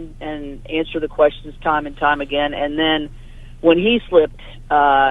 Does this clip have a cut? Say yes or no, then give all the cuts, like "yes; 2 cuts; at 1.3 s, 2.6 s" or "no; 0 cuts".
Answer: no; 0 cuts